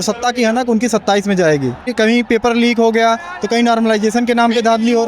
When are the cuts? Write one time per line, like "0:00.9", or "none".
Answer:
0:01.9